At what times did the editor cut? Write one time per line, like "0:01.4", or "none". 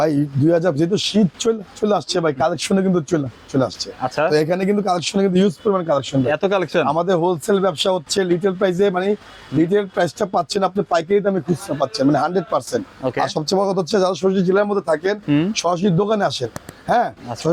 none